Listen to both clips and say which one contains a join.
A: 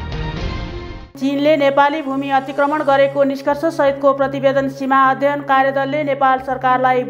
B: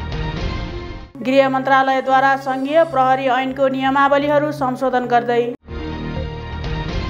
A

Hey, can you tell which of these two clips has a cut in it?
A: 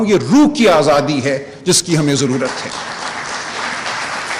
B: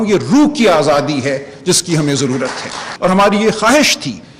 B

